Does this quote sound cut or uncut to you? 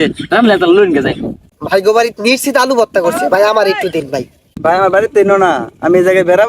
cut